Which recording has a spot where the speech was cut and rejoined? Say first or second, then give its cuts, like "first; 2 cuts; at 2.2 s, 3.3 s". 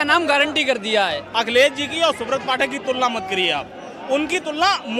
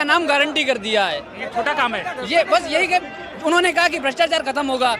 first; 1 cut; at 1.2 s